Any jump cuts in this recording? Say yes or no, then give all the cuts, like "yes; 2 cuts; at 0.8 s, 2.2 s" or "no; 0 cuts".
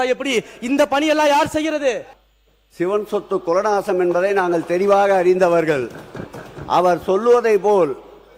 yes; 1 cut; at 2.1 s